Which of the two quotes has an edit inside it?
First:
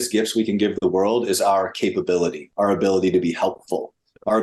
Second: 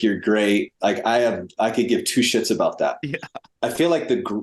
second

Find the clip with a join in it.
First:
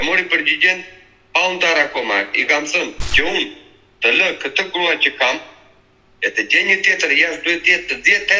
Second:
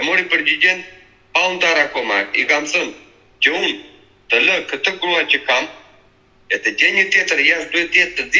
first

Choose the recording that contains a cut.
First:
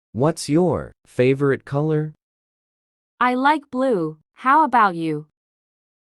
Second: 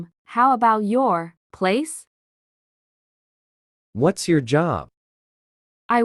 first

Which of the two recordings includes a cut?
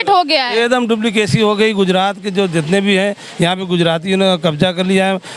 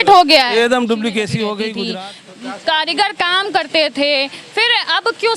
second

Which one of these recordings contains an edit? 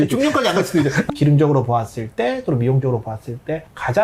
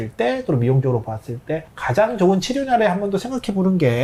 first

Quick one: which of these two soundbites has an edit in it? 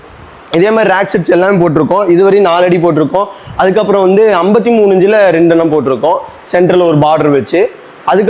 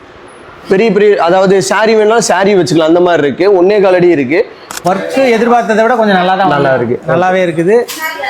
second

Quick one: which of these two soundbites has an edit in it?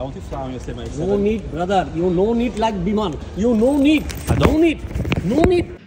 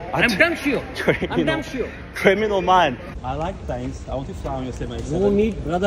second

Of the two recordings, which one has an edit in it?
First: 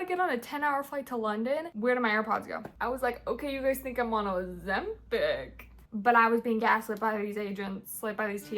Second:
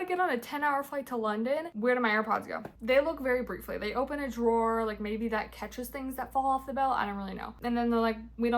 first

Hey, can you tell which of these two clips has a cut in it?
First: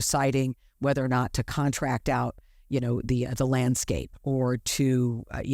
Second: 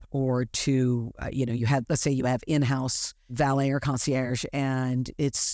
second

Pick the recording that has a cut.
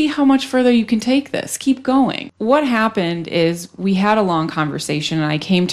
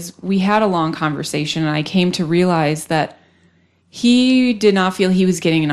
first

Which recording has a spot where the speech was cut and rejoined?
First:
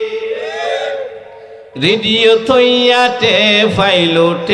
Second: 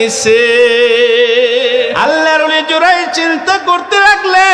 second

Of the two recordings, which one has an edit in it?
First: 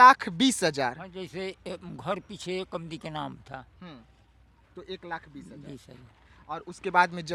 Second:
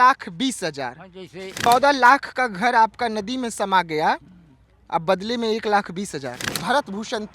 second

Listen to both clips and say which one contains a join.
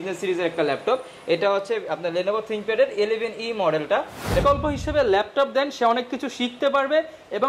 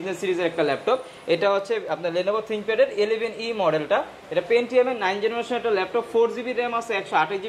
first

